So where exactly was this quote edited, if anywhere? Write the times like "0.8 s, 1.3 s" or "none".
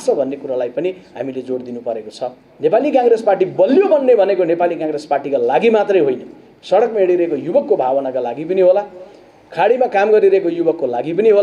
2.4 s